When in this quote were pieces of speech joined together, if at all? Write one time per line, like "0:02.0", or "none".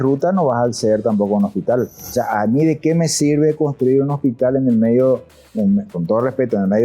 0:02.0